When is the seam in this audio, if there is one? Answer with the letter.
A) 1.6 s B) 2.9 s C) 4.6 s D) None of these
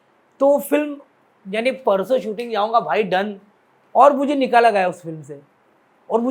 D